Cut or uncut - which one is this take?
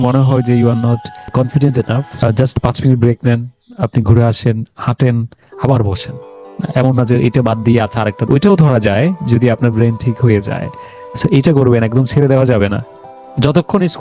cut